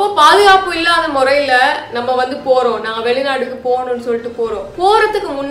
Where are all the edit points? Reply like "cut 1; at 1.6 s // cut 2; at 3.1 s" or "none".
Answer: none